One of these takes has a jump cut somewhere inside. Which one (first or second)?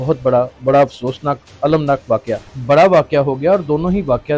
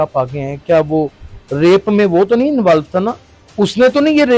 first